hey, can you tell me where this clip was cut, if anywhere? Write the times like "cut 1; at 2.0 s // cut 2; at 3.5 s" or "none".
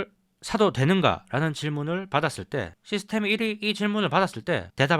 none